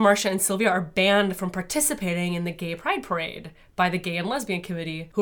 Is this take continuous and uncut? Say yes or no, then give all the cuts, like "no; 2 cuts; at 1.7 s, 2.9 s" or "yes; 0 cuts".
yes; 0 cuts